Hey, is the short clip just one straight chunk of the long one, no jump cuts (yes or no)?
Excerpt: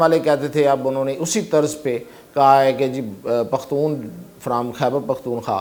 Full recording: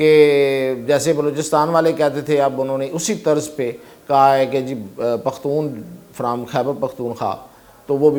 yes